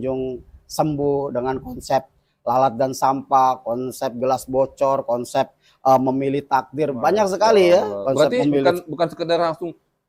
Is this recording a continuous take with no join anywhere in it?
yes; 0 cuts

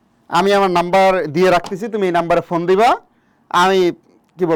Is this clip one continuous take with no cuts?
yes; 0 cuts

